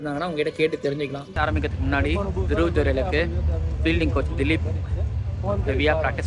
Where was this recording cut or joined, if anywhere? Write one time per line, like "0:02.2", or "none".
0:01.2